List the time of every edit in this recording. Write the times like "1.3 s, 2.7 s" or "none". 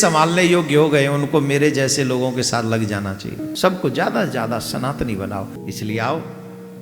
3.5 s, 5.6 s